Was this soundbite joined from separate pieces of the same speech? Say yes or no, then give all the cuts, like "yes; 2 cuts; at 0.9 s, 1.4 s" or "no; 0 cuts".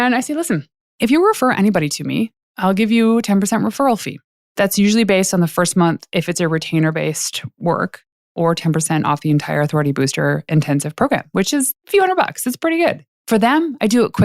yes; 1 cut; at 13.1 s